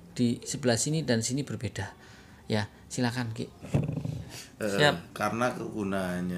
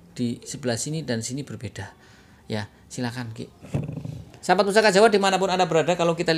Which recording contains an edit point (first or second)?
first